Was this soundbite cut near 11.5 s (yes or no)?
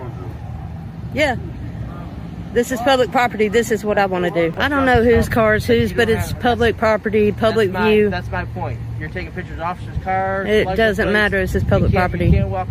no